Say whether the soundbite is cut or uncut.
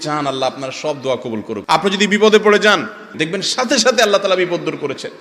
cut